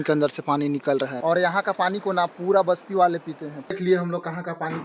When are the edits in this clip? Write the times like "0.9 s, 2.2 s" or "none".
1.2 s, 3.8 s